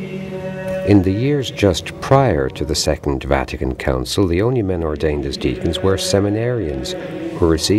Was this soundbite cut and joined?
yes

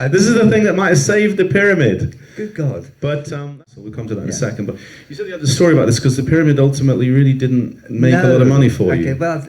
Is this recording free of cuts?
no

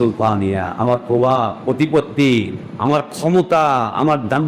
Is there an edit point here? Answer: yes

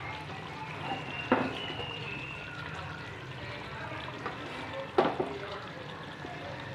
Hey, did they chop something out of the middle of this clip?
no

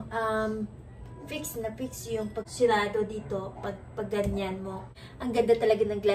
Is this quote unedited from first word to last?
no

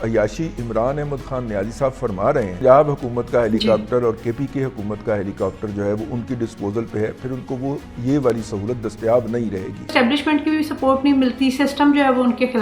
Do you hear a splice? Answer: yes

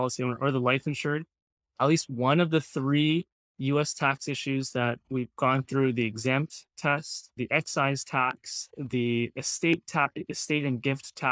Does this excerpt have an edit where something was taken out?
no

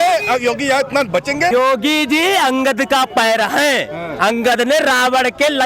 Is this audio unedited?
no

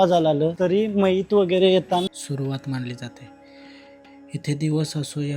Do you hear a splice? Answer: yes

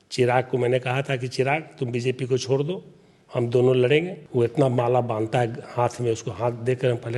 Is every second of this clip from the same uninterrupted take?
no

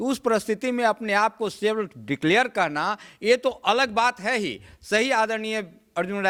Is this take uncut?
yes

